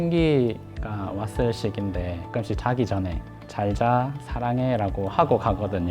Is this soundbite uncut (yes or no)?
no